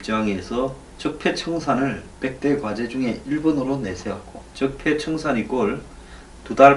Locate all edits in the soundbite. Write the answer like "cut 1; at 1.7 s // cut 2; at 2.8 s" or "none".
none

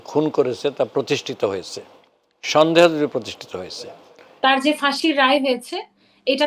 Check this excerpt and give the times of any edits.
cut 1; at 4.2 s

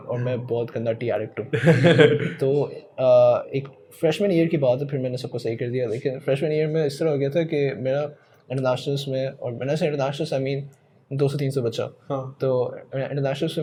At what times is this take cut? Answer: none

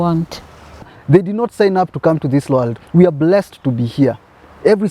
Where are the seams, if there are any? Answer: cut 1; at 1.0 s

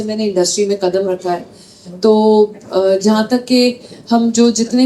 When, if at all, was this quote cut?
none

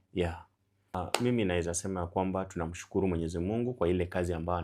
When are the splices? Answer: cut 1; at 0.9 s

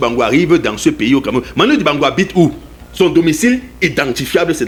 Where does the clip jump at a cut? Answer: none

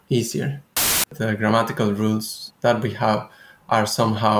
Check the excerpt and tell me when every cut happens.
cut 1; at 1.0 s // cut 2; at 2.4 s

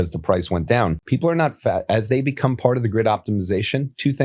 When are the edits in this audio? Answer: cut 1; at 1.0 s

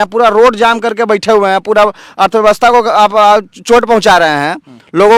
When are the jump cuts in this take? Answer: none

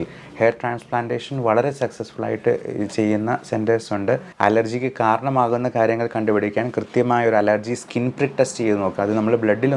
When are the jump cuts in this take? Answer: cut 1; at 4.3 s

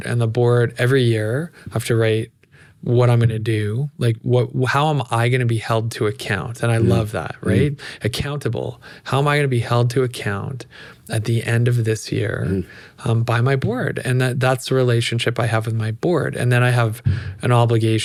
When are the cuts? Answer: none

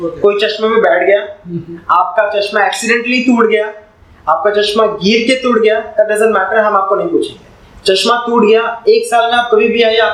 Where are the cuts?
none

